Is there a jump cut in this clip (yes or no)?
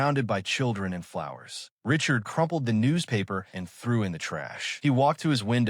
yes